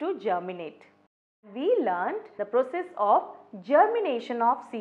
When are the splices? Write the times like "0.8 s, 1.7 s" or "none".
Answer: 1.4 s, 2.3 s